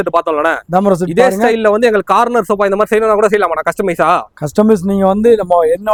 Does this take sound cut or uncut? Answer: uncut